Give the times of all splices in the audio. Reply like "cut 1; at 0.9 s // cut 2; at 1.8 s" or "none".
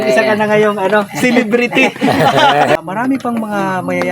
cut 1; at 2.8 s